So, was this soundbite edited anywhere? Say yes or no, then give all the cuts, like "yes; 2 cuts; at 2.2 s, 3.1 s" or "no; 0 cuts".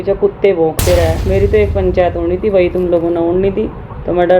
yes; 1 cut; at 1.2 s